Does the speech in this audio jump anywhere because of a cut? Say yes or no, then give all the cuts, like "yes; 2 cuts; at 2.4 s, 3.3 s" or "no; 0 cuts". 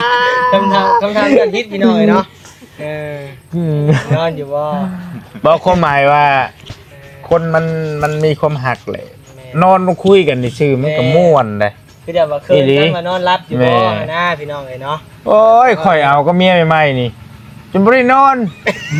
no; 0 cuts